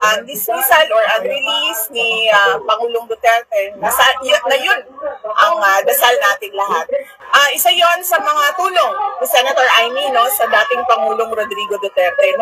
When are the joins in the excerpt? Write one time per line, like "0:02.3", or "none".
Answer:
0:07.1